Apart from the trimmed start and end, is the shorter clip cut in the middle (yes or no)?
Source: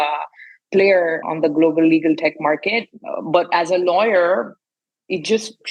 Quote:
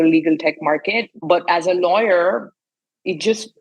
yes